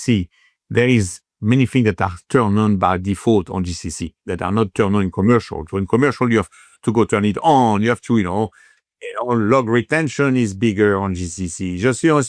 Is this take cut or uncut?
uncut